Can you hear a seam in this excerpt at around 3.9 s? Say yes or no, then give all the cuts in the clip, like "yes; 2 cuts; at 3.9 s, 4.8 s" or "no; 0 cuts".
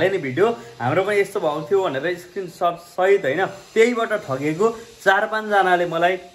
no; 0 cuts